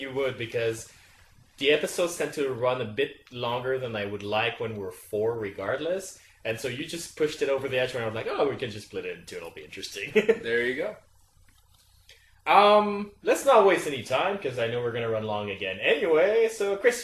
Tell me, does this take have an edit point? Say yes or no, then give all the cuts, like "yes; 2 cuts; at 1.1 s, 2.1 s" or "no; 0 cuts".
yes; 1 cut; at 10.3 s